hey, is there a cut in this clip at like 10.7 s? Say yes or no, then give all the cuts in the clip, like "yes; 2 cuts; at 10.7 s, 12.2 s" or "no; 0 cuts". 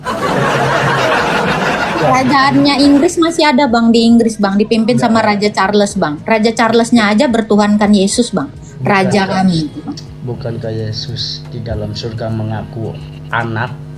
no; 0 cuts